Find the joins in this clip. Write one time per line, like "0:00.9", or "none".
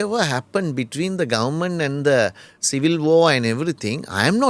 none